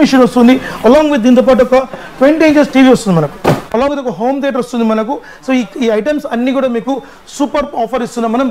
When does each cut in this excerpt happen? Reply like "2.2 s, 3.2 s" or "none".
3.9 s